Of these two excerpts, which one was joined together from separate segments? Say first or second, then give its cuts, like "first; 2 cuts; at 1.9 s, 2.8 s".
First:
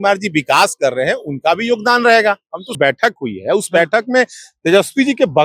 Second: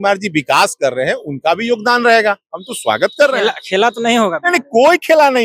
first; 1 cut; at 2.8 s